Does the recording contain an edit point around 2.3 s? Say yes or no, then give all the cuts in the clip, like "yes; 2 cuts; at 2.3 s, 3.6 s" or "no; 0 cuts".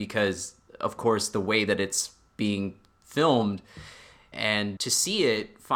no; 1 cut; at 4.3 s